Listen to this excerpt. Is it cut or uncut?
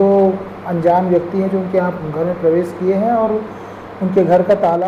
uncut